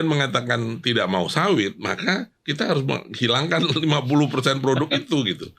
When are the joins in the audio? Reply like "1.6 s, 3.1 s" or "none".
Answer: none